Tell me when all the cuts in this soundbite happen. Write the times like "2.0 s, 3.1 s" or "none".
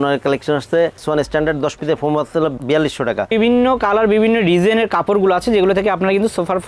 1.0 s, 3.3 s